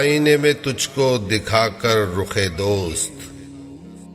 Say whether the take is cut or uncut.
cut